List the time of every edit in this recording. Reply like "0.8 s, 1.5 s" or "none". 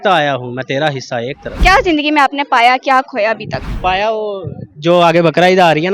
1.5 s, 3.7 s

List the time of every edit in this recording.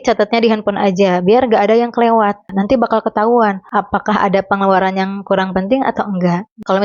2.5 s

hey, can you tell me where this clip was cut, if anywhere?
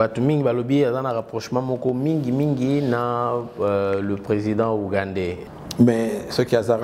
5.4 s

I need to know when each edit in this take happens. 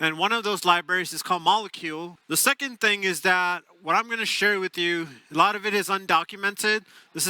2.1 s

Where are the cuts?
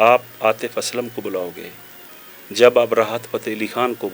none

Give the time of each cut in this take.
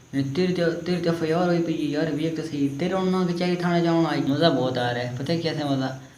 4.3 s

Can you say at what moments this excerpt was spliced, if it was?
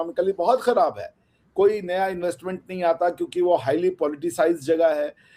none

